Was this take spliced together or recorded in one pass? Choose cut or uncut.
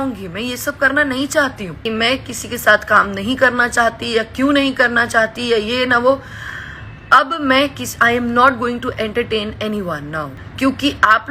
cut